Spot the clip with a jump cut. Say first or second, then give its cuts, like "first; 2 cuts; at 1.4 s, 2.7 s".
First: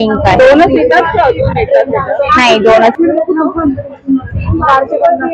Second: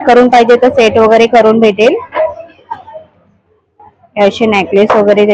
first; 1 cut; at 3.0 s